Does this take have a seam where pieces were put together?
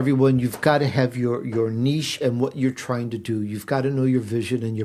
no; 0 cuts

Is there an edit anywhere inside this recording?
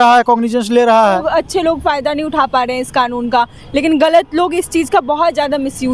yes; 1 cut; at 1.2 s

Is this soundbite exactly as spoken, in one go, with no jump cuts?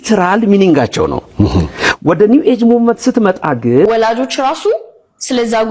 no; 1 cut; at 3.9 s

